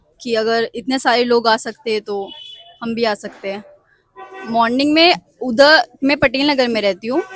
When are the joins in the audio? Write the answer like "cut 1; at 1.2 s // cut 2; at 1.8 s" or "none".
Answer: none